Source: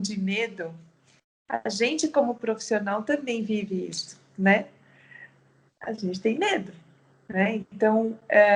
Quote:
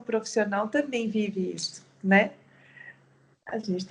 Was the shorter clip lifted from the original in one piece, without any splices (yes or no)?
yes